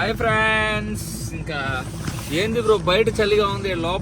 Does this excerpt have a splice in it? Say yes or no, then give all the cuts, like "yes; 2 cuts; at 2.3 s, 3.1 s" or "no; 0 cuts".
no; 0 cuts